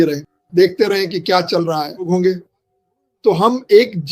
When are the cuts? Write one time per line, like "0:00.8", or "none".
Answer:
0:02.1